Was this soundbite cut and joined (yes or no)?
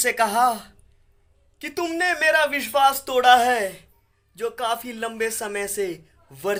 no